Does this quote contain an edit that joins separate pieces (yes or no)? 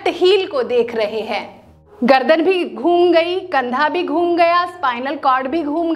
yes